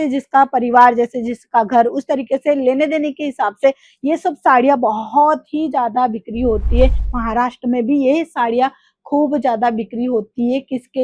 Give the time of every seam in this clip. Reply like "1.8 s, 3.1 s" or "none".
7.1 s